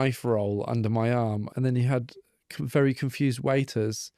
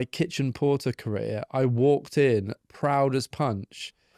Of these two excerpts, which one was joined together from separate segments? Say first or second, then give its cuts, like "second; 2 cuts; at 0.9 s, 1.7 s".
first; 1 cut; at 1.5 s